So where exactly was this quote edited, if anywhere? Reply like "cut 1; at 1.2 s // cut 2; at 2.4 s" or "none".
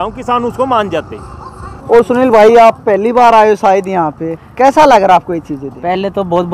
cut 1; at 1.7 s